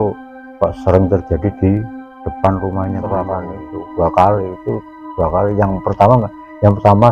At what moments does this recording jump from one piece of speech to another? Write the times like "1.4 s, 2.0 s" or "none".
3.0 s